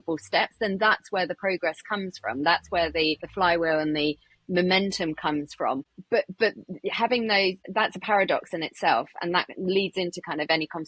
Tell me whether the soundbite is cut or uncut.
cut